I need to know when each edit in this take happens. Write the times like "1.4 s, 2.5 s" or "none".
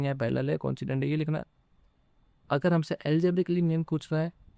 none